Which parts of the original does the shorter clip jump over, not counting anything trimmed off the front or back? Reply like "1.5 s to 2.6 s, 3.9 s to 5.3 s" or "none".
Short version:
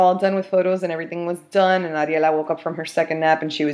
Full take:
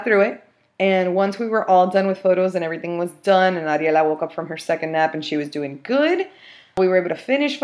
none